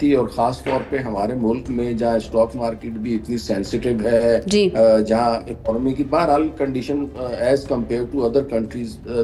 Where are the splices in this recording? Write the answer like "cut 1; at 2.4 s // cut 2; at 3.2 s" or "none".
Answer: none